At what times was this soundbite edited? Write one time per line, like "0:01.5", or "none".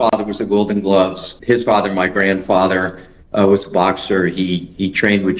0:01.3